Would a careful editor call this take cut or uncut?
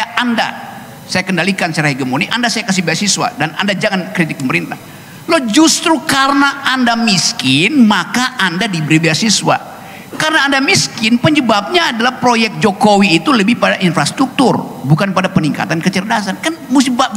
uncut